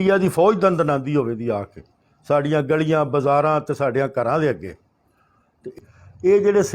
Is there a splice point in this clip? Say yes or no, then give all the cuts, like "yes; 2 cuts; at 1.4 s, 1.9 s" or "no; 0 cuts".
yes; 1 cut; at 5.7 s